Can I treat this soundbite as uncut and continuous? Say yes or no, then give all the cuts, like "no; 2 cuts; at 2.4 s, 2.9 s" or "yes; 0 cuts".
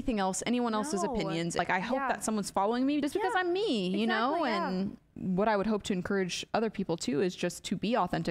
no; 3 cuts; at 1.6 s, 3.0 s, 5.1 s